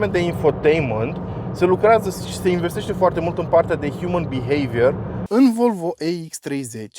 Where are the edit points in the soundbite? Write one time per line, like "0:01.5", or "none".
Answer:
0:05.2